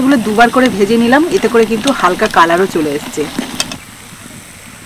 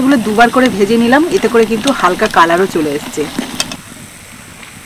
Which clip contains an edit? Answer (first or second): second